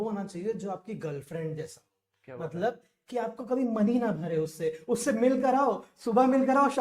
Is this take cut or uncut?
uncut